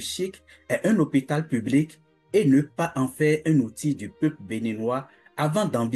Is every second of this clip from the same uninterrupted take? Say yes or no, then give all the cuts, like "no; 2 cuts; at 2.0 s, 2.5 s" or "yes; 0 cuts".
yes; 0 cuts